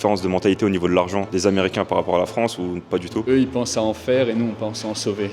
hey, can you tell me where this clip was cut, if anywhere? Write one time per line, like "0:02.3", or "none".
0:03.3